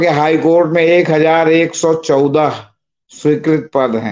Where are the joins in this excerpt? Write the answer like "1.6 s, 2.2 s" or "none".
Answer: none